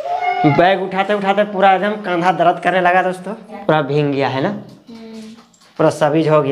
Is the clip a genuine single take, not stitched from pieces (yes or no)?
no